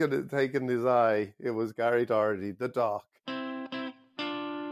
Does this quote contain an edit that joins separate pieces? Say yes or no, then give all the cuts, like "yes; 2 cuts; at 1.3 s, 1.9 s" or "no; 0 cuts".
yes; 1 cut; at 3.2 s